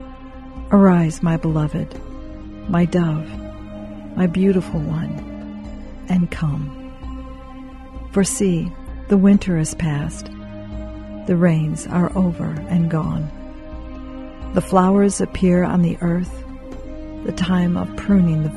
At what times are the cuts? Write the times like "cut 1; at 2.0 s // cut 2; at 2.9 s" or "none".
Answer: none